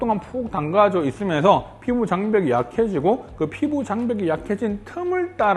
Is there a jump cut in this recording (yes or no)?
no